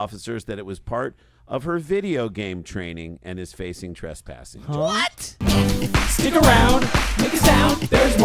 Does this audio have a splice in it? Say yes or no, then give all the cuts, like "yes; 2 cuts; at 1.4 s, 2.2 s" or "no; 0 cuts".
yes; 1 cut; at 5.4 s